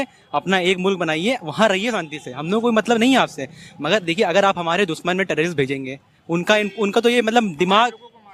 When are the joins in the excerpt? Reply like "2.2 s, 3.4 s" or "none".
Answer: none